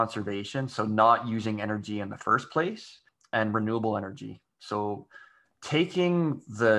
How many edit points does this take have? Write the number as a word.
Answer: one